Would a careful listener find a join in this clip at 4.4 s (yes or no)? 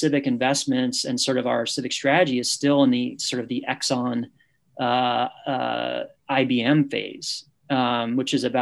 no